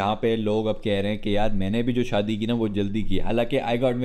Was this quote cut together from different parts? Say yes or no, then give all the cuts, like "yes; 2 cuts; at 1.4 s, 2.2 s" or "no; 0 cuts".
no; 0 cuts